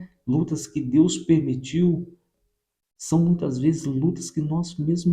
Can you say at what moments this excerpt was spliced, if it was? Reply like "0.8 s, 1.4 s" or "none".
2.2 s